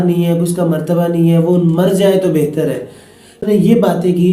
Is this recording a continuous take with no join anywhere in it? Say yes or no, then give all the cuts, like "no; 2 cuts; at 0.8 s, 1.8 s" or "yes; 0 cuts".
no; 1 cut; at 3.4 s